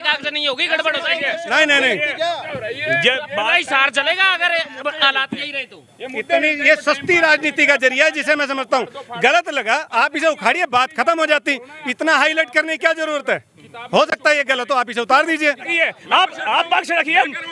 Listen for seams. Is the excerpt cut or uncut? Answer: cut